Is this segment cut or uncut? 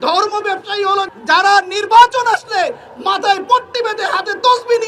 uncut